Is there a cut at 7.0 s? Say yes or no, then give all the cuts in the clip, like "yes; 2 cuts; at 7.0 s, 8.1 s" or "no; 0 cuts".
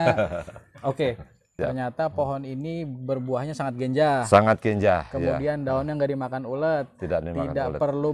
no; 1 cut; at 1.5 s